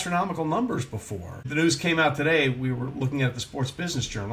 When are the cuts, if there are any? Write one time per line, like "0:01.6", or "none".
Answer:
0:01.5